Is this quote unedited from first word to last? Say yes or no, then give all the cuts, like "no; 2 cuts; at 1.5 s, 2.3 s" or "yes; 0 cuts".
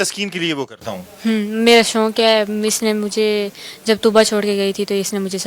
yes; 0 cuts